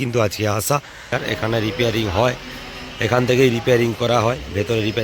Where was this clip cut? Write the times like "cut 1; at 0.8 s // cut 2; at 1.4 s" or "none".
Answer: cut 1; at 1.1 s